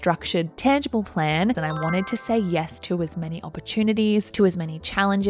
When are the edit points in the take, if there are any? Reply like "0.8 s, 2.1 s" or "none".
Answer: 1.6 s